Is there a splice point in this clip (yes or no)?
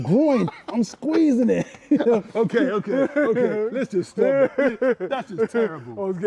no